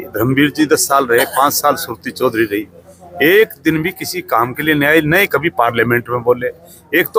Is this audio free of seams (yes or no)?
yes